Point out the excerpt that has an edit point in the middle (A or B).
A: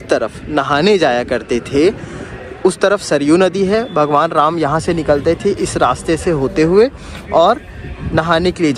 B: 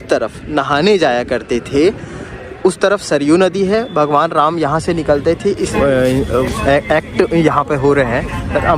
B